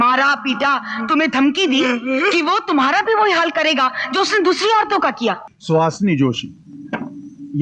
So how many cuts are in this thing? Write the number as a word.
one